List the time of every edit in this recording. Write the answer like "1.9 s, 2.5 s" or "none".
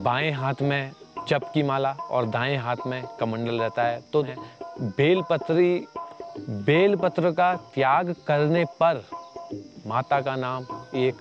4.2 s